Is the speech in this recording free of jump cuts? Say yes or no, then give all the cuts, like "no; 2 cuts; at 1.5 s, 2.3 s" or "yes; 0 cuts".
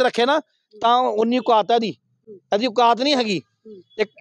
yes; 0 cuts